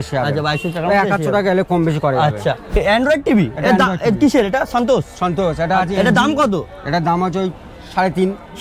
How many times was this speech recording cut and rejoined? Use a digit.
0